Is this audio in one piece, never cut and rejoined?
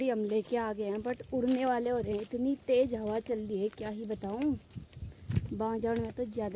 yes; 0 cuts

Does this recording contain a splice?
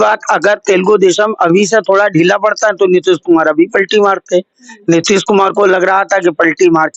no; 0 cuts

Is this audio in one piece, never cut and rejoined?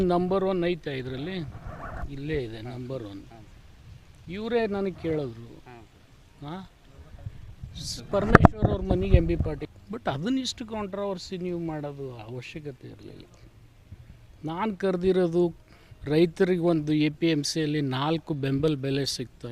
no; 1 cut; at 9.6 s

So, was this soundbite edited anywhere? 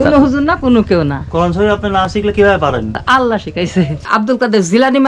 yes; 2 cuts; at 3.0 s, 4.1 s

